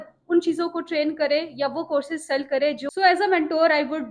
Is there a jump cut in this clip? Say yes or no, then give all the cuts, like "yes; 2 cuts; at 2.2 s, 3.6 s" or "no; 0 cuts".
yes; 1 cut; at 2.8 s